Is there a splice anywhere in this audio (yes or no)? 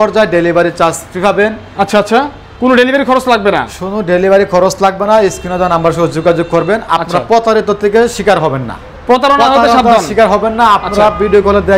no